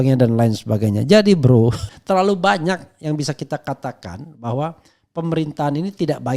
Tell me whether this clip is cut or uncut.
cut